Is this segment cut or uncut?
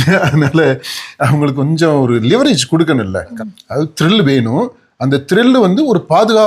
cut